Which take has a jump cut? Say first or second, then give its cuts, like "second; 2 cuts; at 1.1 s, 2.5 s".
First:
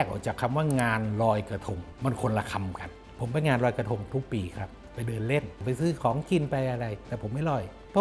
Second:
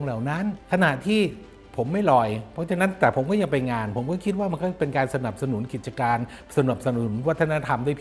first; 3 cuts; at 1.8 s, 3.1 s, 5.5 s